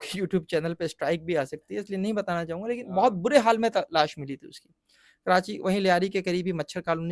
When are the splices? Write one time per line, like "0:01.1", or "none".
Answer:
none

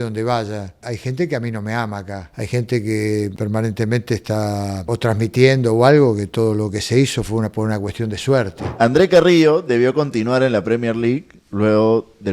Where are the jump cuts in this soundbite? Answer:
0:00.8
0:02.2
0:03.3
0:04.8
0:08.6

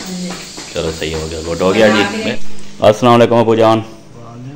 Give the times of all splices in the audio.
0:02.4

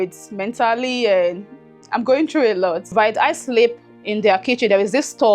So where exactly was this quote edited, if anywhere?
0:02.9

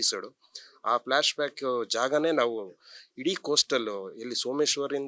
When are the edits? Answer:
none

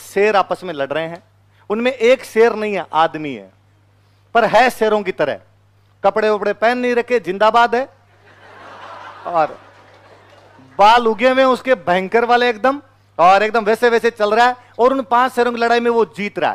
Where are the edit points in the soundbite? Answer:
none

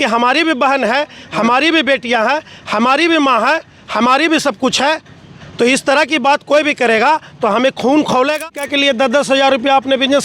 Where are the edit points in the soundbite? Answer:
0:08.4

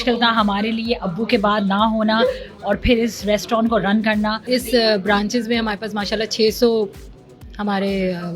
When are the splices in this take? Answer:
0:04.4

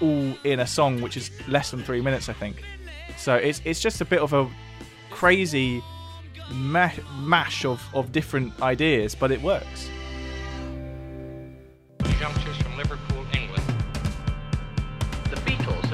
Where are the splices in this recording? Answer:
0:12.1

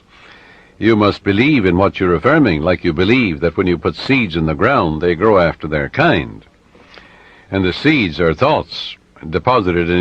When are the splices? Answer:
0:08.4

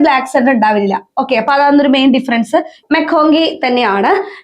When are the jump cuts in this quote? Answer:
0:02.8

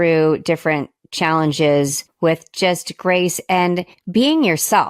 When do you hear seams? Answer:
0:02.0
0:03.9

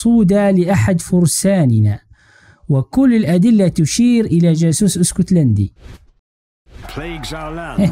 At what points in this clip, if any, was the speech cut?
0:06.3

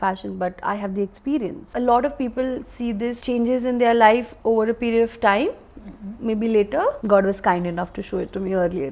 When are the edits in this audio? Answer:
0:01.7
0:03.2
0:07.0

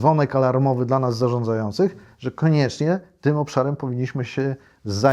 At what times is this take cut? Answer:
none

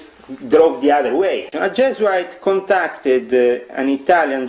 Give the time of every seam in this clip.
0:01.5

